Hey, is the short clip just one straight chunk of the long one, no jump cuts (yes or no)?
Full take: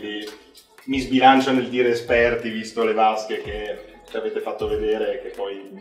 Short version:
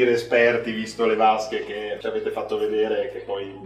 no